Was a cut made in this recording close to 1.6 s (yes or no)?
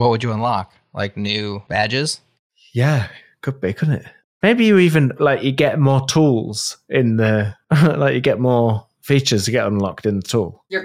yes